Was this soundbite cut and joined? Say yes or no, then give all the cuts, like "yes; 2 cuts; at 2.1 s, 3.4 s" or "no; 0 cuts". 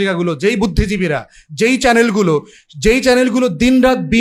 no; 0 cuts